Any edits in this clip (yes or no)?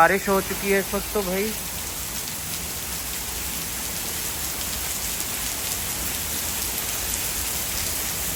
no